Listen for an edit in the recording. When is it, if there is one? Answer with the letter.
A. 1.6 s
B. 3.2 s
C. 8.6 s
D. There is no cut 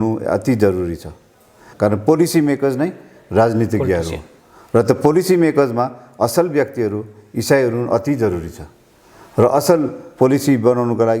A